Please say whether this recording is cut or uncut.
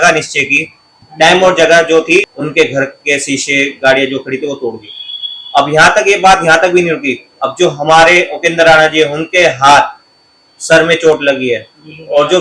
cut